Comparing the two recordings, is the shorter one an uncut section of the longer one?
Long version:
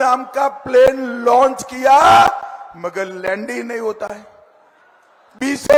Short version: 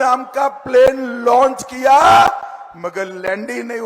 yes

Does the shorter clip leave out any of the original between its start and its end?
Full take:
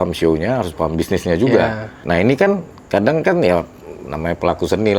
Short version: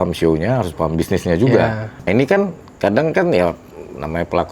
yes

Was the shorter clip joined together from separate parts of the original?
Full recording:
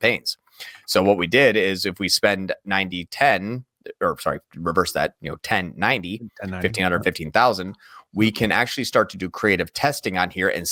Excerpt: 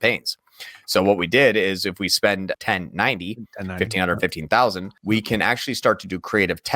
yes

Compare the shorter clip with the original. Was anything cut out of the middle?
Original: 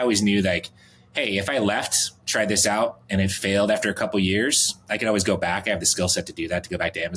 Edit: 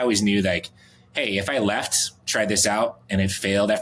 no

